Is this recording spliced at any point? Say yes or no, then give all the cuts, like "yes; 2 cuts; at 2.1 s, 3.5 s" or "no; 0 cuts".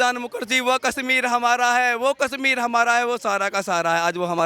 no; 0 cuts